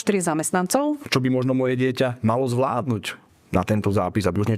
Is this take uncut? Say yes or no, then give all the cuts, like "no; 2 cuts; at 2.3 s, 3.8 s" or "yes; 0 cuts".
no; 1 cut; at 1.0 s